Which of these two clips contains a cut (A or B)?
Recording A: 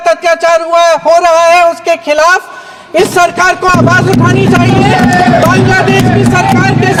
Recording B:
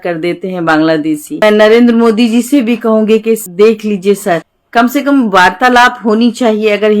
B